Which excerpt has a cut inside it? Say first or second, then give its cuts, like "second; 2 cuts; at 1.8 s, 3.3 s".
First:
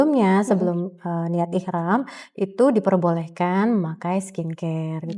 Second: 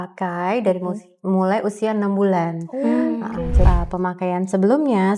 second; 1 cut; at 3.7 s